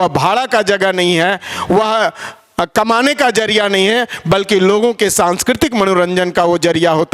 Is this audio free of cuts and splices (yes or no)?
yes